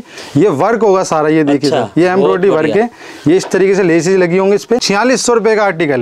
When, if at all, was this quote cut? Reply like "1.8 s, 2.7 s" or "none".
4.8 s